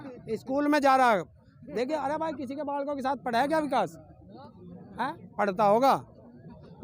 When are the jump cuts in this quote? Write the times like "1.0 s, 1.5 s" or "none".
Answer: none